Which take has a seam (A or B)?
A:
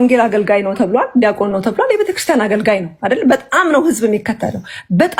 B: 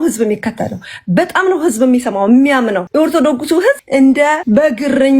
B